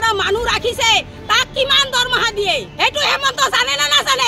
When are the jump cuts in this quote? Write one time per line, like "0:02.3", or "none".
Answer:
0:02.7